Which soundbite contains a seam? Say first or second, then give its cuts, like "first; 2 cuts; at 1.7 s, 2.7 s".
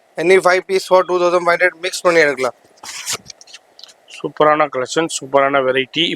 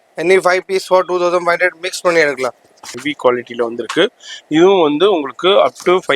second; 1 cut; at 2.9 s